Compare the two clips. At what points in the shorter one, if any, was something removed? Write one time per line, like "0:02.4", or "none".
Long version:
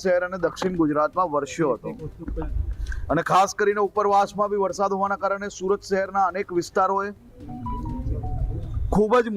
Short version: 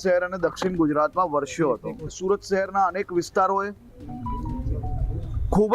0:02.1